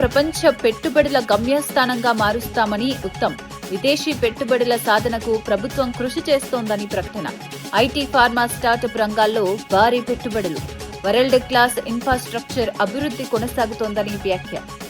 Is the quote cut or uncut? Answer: uncut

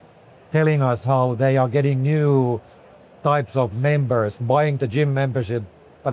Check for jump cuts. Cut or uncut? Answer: uncut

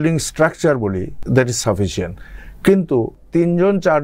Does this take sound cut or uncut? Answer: cut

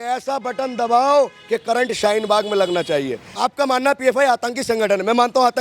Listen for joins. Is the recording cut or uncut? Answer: cut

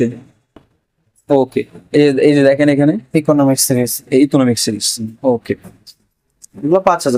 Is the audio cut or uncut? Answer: uncut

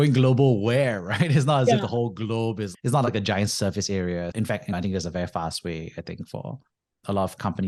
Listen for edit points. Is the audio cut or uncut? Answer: uncut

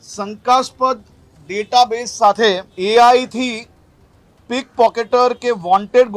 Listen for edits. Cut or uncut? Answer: cut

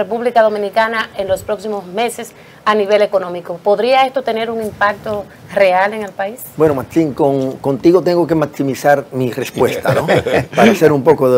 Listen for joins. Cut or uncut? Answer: uncut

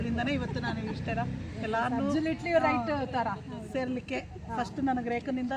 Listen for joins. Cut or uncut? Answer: uncut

